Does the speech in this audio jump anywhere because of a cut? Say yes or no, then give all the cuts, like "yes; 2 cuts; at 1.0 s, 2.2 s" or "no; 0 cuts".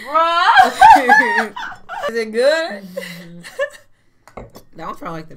yes; 1 cut; at 2.1 s